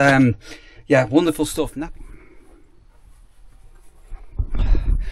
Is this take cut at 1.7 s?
yes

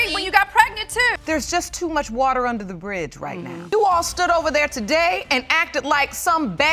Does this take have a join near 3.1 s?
no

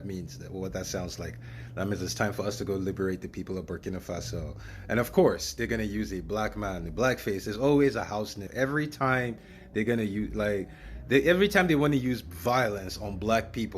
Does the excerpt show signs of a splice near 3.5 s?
no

